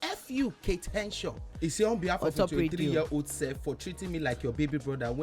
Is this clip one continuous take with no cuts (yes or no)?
no